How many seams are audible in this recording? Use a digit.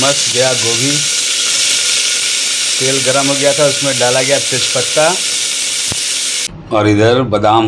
1